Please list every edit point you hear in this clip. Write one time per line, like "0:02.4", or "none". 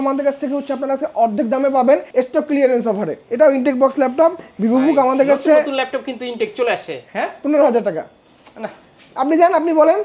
0:02.1
0:03.2
0:07.0